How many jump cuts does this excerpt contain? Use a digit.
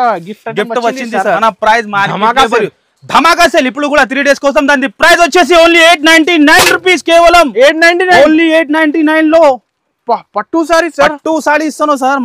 1